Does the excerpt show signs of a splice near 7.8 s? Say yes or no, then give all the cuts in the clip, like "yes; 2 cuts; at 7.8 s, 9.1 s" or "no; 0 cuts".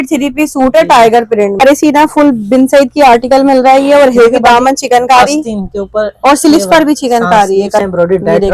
yes; 2 cuts; at 1.6 s, 7.8 s